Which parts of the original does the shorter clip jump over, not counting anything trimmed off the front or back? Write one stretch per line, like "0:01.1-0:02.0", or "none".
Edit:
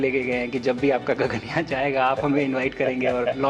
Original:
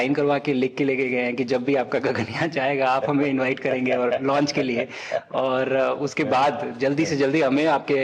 none